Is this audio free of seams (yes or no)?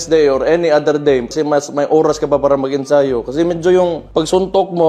yes